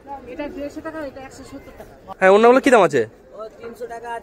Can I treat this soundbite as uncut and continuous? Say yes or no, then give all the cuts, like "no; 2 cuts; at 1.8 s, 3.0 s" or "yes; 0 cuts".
no; 1 cut; at 2.2 s